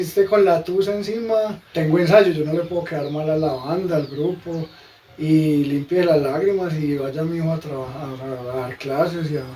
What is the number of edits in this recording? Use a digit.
1